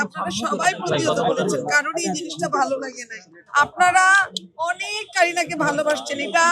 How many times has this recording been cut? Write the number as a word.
one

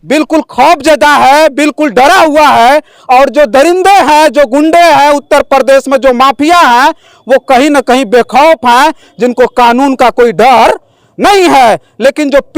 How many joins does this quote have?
zero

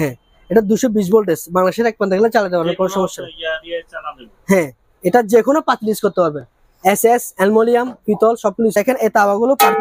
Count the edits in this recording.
one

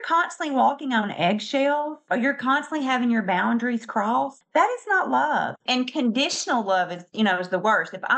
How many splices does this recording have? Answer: two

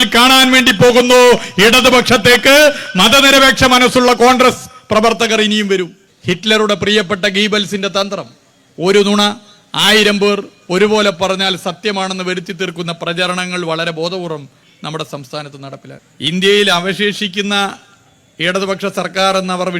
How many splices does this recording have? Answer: two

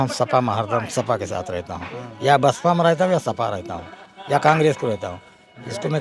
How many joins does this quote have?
zero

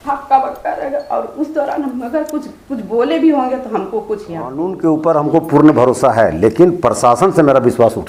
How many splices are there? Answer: one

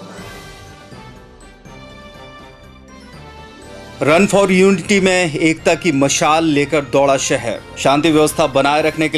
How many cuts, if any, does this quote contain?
one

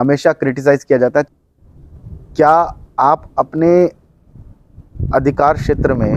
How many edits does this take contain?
one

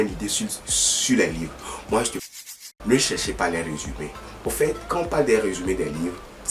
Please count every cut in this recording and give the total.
one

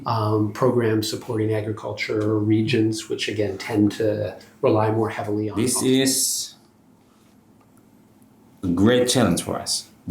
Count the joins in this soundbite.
one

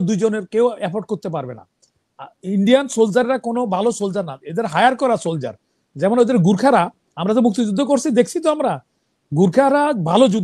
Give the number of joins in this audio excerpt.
zero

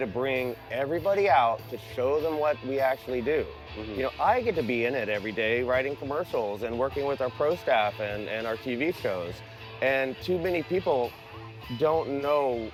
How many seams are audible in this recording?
zero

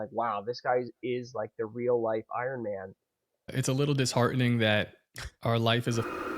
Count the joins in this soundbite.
one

